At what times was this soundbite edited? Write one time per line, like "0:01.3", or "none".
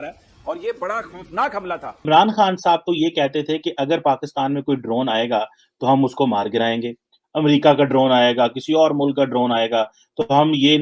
0:01.9